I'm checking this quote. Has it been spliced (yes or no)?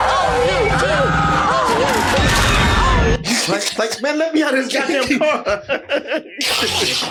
no